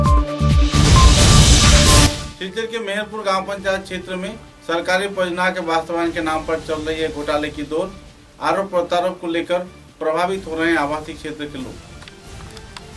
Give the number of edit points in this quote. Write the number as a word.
zero